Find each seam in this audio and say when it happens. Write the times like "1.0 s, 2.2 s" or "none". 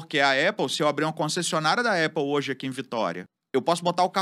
3.3 s